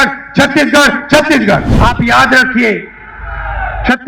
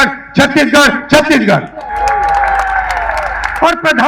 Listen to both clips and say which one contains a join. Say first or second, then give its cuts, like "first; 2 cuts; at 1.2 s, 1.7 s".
first; 1 cut; at 1.7 s